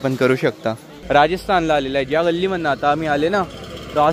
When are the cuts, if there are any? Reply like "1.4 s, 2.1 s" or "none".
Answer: 1.0 s